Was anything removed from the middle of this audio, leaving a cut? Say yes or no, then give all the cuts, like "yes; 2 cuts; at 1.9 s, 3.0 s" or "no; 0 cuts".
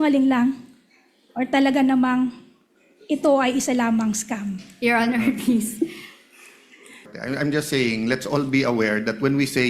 yes; 1 cut; at 7.1 s